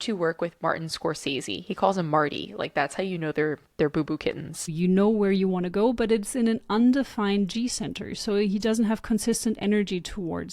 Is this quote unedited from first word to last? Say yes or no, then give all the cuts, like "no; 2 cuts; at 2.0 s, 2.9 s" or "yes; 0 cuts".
no; 1 cut; at 4.7 s